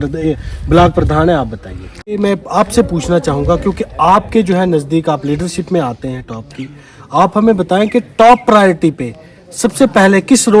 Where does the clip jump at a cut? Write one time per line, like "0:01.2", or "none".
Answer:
0:02.2